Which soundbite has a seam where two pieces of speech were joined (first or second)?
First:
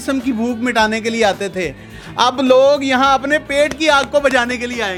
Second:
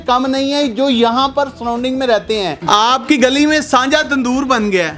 second